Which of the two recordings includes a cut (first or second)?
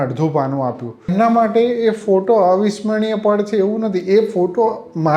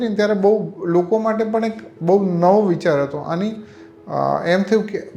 first